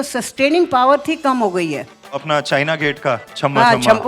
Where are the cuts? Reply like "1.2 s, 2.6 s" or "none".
2.2 s